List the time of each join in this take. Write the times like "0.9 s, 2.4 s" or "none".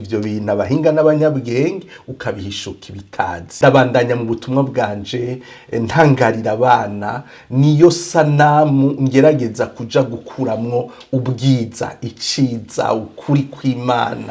3.5 s